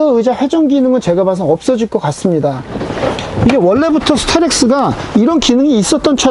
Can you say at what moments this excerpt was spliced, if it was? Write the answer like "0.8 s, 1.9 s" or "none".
2.7 s